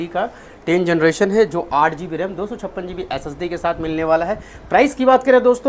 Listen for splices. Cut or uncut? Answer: uncut